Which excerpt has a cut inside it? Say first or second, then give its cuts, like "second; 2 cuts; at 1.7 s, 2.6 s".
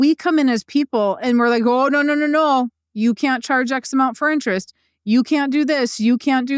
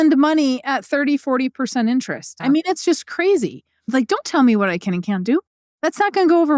second; 3 cuts; at 2.3 s, 3.8 s, 5.6 s